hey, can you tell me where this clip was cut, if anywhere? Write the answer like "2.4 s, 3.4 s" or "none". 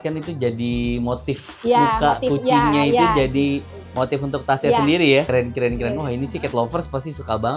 5.3 s